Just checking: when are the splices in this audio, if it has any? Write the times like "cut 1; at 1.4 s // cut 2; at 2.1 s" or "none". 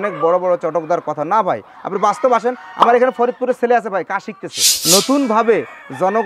cut 1; at 4.7 s